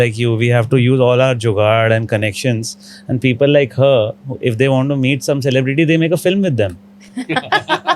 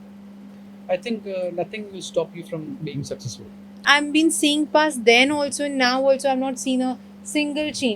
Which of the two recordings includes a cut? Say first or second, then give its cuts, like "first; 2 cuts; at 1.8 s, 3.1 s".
second; 1 cut; at 3.8 s